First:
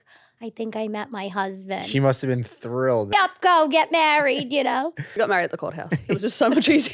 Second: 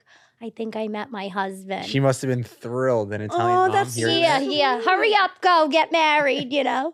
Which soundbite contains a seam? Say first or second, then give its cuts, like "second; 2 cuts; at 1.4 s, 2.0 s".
first; 2 cuts; at 3.1 s, 5.2 s